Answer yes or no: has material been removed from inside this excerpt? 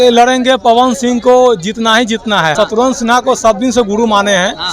yes